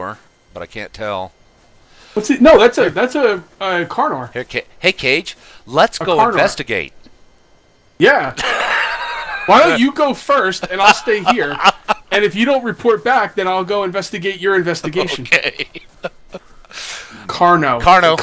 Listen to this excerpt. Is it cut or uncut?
uncut